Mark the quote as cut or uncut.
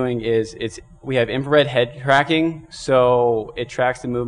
cut